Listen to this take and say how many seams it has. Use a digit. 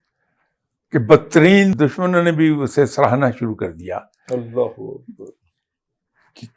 1